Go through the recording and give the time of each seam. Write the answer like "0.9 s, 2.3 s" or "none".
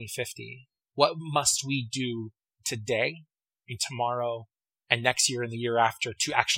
0.9 s